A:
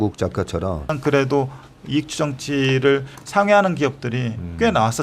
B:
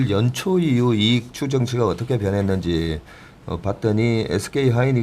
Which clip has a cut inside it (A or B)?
A